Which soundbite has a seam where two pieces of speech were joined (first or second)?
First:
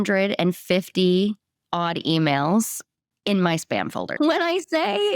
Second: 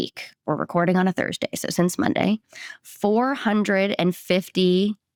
first